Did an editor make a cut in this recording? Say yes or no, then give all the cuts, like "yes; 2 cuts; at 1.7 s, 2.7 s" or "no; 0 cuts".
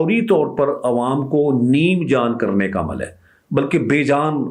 no; 0 cuts